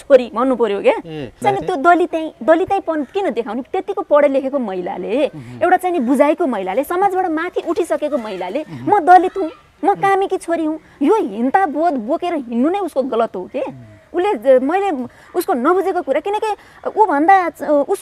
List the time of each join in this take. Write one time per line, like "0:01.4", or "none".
0:01.4